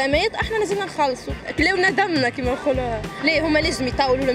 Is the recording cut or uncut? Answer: cut